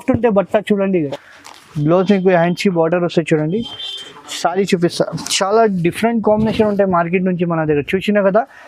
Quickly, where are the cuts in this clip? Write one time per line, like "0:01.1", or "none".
0:00.9